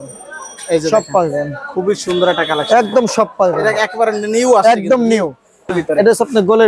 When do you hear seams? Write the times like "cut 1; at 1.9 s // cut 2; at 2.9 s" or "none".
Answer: cut 1; at 5.7 s